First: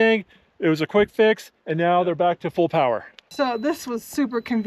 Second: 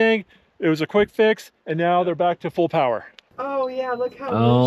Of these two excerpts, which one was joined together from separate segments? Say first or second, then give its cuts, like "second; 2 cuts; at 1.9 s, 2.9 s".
second; 1 cut; at 3.2 s